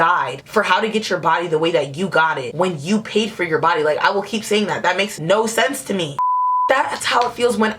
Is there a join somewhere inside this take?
yes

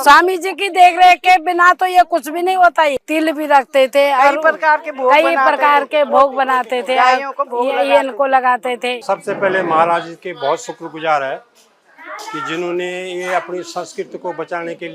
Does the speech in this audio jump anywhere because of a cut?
yes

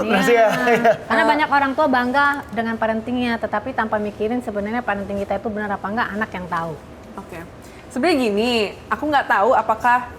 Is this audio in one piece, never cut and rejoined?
yes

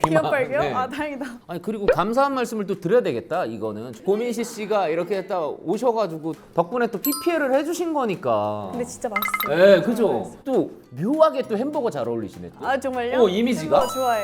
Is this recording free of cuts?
yes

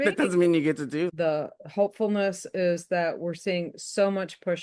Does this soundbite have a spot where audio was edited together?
yes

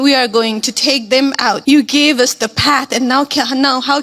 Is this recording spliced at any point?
yes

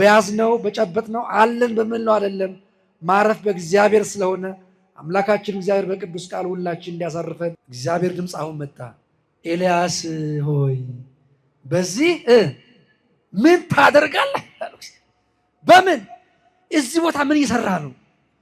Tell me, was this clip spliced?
yes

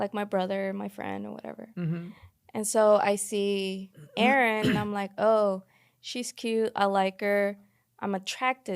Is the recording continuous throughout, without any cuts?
yes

